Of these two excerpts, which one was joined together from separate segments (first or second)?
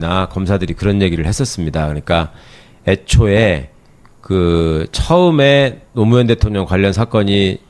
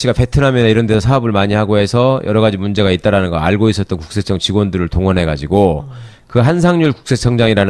first